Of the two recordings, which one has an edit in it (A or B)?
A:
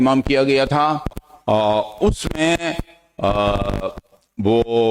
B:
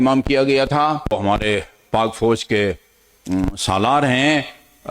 B